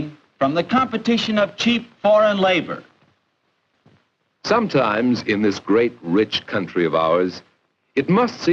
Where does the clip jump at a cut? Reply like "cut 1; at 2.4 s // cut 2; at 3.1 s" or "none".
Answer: none